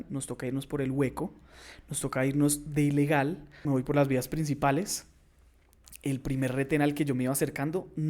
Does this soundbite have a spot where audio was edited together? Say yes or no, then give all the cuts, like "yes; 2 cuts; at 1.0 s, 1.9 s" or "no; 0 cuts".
yes; 1 cut; at 3.5 s